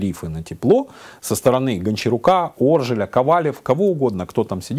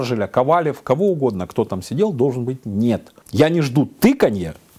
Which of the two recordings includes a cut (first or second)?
second